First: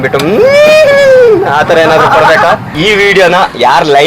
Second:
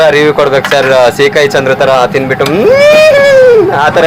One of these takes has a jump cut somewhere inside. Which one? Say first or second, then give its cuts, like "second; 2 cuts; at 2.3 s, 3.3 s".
first; 1 cut; at 2.7 s